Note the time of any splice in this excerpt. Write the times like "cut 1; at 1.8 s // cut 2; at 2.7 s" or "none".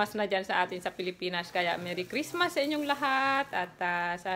none